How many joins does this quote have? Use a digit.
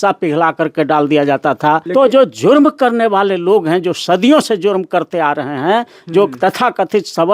1